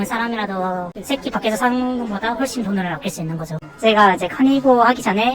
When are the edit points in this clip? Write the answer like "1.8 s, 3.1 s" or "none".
3.5 s